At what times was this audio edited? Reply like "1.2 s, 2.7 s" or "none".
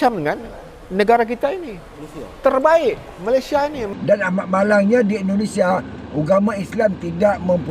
3.8 s